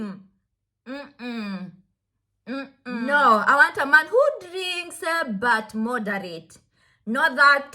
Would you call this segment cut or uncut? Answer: cut